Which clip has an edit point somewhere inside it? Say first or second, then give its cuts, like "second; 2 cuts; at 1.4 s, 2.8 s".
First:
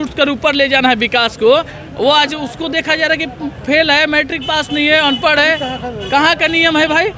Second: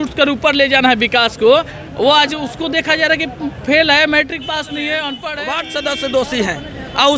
second; 1 cut; at 5.2 s